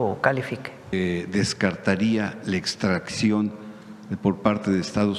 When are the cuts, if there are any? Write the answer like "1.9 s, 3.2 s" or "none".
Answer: 0.9 s